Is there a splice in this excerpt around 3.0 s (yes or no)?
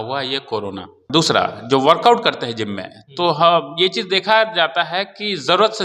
no